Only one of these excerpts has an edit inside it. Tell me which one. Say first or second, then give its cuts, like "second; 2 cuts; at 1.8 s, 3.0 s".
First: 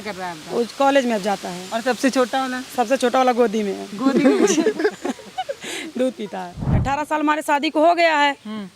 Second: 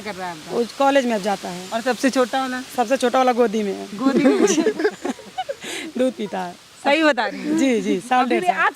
first; 1 cut; at 6.8 s